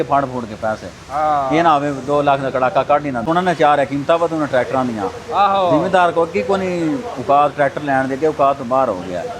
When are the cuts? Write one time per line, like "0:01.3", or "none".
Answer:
0:03.2